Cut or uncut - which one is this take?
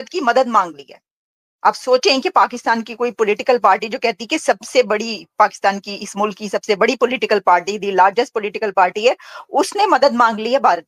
uncut